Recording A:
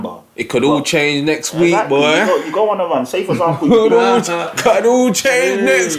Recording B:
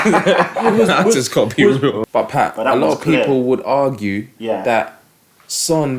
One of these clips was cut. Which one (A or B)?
B